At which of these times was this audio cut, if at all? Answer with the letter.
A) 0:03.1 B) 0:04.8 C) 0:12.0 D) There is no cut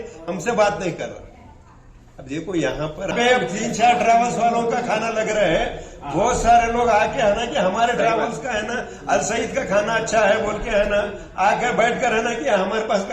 A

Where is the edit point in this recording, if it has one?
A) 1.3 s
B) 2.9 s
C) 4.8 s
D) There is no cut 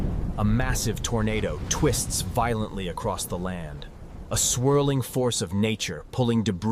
D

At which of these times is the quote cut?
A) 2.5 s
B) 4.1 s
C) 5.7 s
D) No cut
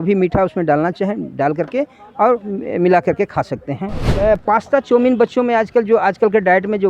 B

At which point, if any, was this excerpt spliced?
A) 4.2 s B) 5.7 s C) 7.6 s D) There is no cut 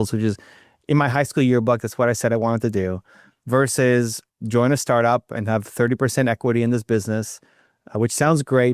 A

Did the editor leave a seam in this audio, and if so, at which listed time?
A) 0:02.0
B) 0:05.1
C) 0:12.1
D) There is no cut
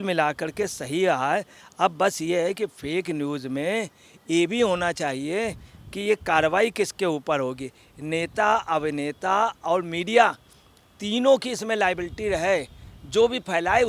D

